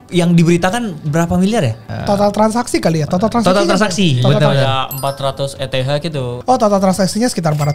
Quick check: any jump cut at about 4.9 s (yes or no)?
no